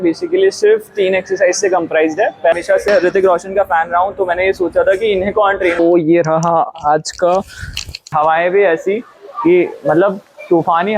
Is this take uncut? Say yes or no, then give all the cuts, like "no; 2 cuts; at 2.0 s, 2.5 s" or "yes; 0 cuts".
no; 3 cuts; at 2.5 s, 5.8 s, 8.1 s